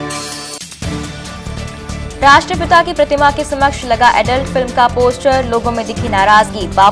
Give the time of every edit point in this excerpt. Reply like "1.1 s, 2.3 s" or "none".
1.6 s